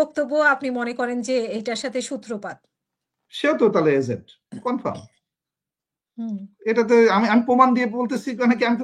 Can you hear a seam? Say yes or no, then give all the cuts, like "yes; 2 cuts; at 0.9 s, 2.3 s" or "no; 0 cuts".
no; 0 cuts